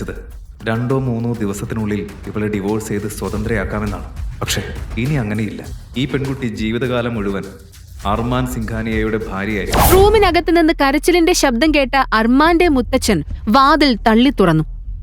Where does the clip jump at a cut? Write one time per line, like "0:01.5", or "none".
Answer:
0:09.9